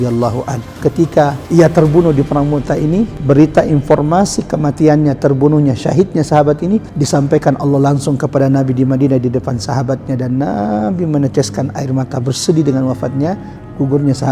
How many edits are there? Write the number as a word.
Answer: three